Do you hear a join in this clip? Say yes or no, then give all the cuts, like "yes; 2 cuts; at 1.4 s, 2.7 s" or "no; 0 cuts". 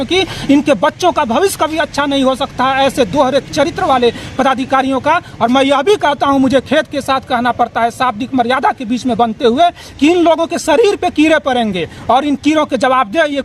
no; 0 cuts